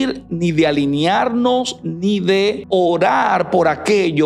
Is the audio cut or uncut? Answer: cut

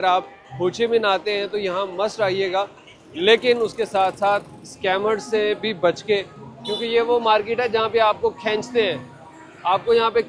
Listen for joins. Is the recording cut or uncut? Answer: uncut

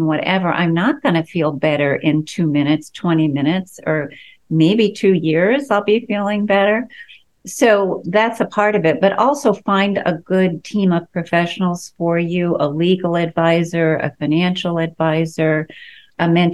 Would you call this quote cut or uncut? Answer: uncut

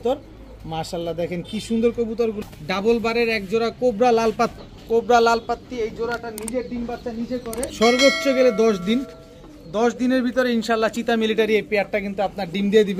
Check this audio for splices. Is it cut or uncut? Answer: cut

